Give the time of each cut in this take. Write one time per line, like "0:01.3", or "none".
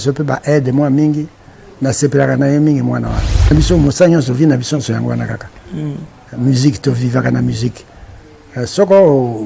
0:03.5

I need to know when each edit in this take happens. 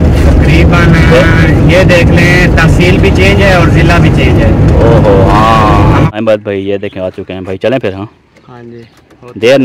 0:06.1

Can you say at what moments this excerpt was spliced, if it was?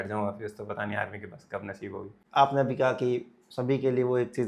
0:02.1

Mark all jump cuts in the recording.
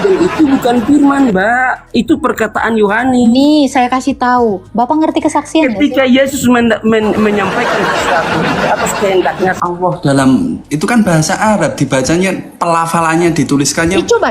0:04.6
0:09.6

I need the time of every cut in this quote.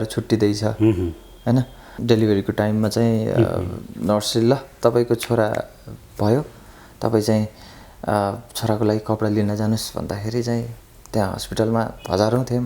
0:01.8

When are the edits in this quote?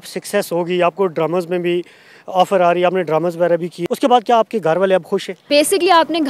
0:03.7
0:05.4

